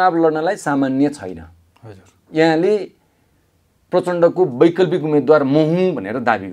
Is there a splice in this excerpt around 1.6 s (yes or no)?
no